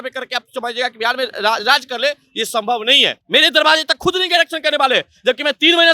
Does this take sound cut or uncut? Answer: cut